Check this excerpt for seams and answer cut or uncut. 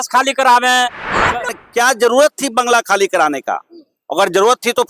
cut